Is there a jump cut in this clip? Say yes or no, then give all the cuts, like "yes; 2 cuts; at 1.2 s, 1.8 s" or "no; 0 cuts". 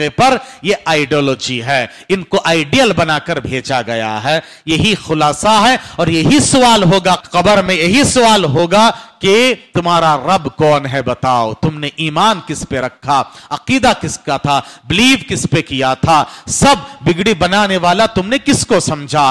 yes; 1 cut; at 7.2 s